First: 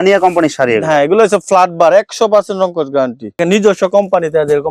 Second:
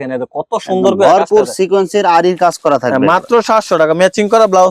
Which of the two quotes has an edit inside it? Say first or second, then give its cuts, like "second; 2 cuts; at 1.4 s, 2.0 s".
first; 1 cut; at 3.4 s